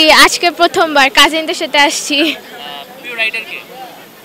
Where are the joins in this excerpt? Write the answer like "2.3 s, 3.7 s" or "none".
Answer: none